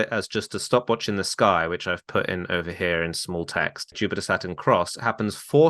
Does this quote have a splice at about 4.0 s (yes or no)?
yes